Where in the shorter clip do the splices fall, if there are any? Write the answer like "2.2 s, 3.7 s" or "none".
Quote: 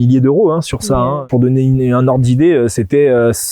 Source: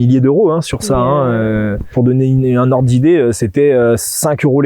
1.2 s